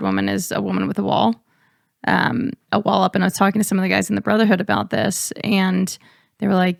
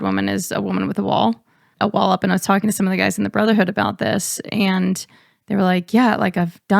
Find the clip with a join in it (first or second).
second